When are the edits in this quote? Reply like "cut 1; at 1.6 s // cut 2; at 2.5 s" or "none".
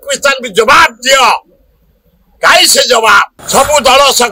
cut 1; at 3.4 s